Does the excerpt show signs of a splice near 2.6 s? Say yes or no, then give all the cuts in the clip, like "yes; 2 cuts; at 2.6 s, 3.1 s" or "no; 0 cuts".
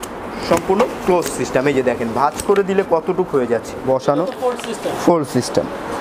no; 1 cut; at 3.8 s